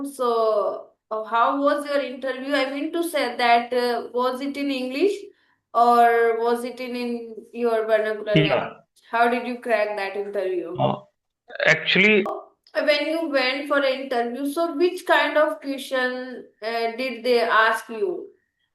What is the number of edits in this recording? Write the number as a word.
one